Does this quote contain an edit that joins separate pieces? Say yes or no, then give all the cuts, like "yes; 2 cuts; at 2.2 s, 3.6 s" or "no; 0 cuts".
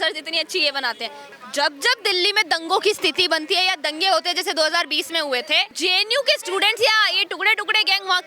yes; 2 cuts; at 1.2 s, 5.7 s